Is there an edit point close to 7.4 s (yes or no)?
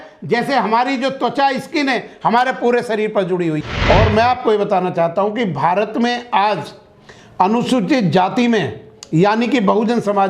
no